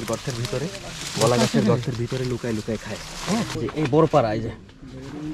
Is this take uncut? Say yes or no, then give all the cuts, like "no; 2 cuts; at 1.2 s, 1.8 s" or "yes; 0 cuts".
no; 1 cut; at 3.1 s